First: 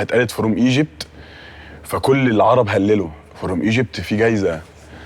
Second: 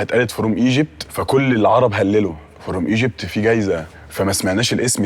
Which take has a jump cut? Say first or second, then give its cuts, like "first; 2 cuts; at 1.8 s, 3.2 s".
second; 2 cuts; at 1.1 s, 4.0 s